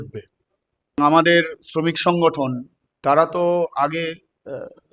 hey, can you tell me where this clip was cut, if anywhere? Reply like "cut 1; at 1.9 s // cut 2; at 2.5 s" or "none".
cut 1; at 1.0 s